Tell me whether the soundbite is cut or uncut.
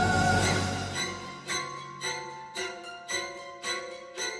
uncut